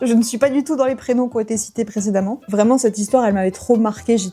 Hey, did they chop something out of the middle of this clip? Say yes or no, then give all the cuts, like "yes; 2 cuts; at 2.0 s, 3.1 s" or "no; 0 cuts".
yes; 1 cut; at 2.4 s